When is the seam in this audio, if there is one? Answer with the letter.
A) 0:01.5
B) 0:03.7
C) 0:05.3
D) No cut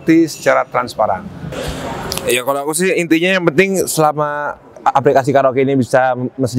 A